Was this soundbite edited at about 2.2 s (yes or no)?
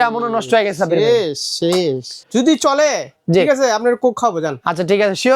yes